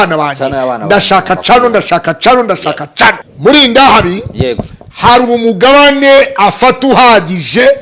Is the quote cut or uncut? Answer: cut